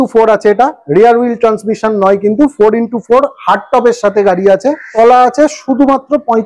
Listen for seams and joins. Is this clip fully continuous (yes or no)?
no